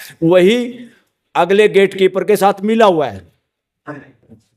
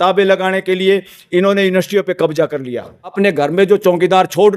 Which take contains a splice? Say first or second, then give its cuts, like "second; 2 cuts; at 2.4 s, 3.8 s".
second; 1 cut; at 3.1 s